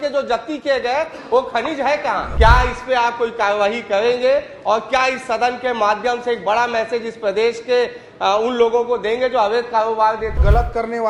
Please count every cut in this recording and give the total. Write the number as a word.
two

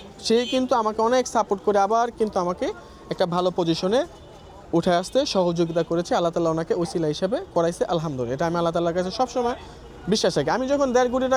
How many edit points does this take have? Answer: zero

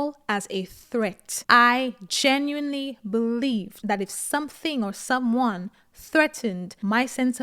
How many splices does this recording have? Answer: one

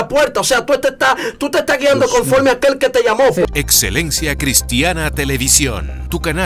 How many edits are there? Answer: one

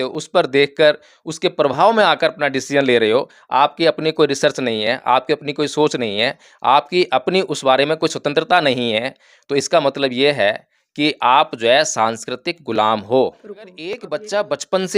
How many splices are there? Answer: one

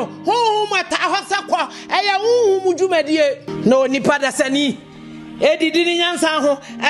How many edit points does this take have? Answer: one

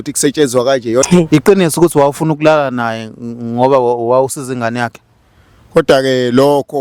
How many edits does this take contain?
one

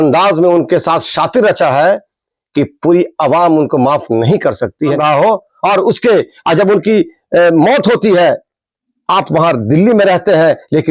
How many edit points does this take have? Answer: one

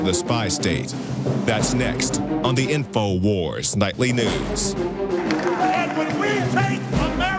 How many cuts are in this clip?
one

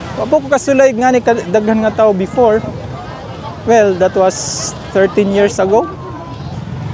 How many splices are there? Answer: zero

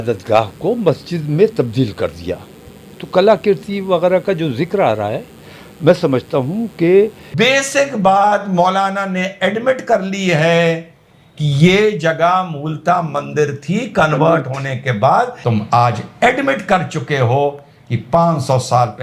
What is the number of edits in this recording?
two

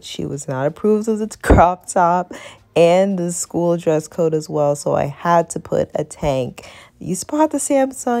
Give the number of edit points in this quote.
zero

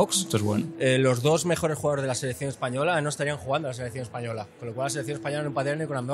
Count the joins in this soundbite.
zero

